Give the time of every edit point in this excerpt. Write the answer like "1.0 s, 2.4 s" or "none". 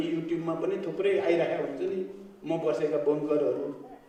none